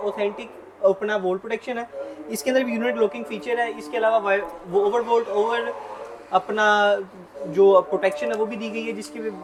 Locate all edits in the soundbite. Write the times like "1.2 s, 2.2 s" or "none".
none